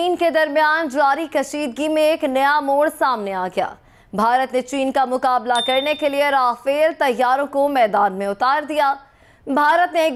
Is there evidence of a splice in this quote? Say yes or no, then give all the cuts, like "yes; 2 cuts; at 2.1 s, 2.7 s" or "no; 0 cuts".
no; 0 cuts